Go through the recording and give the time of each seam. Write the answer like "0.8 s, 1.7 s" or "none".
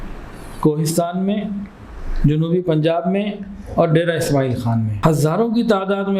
4.9 s